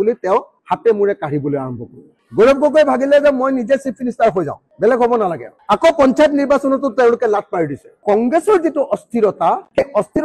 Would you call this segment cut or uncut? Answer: cut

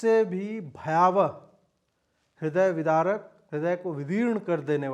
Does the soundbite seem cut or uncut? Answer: cut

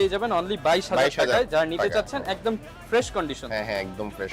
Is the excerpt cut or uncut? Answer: uncut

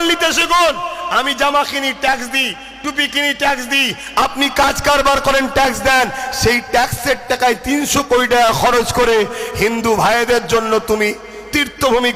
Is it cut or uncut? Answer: uncut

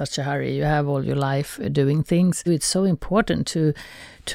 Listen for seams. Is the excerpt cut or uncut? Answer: cut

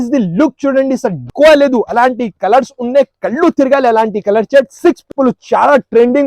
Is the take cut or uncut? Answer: cut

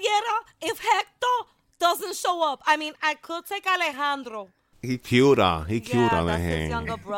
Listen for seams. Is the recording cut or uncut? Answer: cut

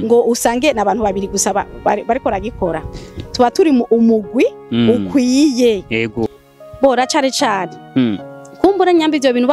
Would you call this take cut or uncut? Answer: cut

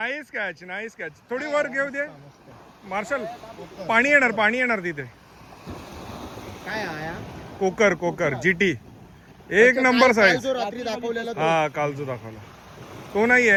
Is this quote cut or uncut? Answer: uncut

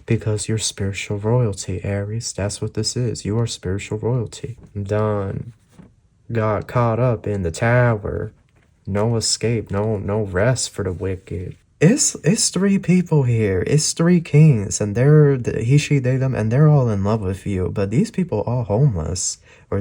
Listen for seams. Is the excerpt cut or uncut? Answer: cut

